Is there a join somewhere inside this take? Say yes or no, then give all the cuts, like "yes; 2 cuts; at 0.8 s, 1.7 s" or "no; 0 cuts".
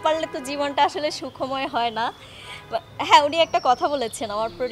no; 0 cuts